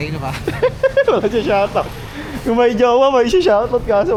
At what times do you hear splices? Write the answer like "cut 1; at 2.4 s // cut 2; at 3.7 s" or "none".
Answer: none